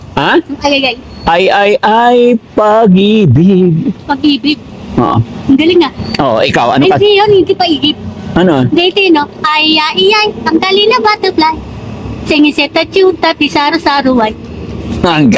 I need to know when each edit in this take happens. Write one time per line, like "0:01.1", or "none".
none